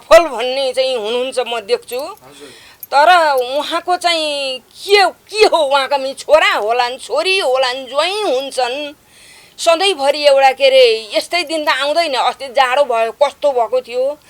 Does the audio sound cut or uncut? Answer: uncut